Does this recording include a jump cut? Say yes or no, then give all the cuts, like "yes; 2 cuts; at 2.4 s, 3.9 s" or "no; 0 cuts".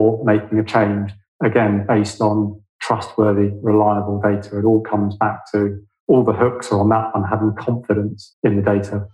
yes; 1 cut; at 8.2 s